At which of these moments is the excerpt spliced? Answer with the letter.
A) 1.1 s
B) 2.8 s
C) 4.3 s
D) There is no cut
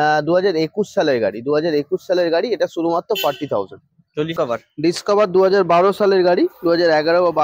C